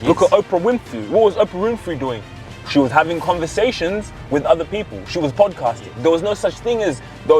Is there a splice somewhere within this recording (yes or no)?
no